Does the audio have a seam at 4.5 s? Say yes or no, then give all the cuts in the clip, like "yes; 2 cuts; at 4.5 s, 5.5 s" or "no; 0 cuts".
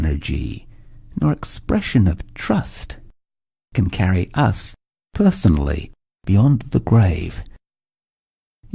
no; 0 cuts